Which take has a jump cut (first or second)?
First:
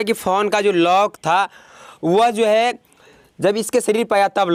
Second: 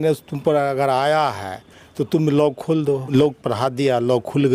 second